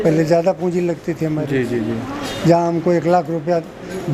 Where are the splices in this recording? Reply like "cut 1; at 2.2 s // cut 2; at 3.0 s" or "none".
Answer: none